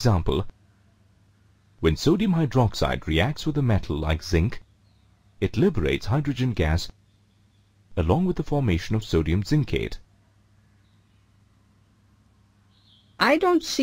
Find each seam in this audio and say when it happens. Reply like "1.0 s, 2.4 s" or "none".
2.2 s